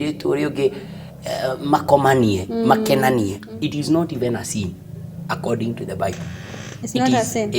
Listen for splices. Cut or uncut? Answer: cut